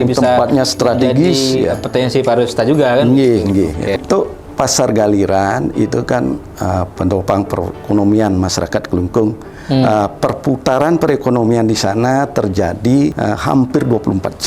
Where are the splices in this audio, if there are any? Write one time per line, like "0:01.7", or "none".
0:04.0
0:13.2